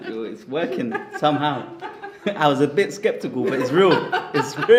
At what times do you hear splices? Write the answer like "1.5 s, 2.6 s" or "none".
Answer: none